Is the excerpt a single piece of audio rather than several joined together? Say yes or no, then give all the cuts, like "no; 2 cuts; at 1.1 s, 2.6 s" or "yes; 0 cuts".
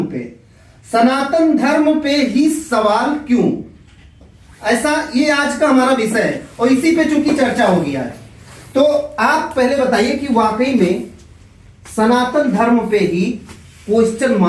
yes; 0 cuts